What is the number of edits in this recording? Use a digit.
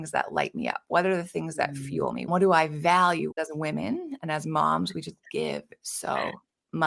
2